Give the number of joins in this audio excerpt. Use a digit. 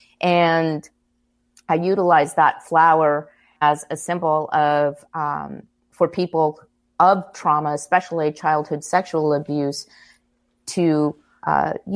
1